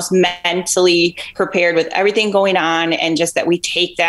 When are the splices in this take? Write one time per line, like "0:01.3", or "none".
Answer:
0:01.2
0:03.0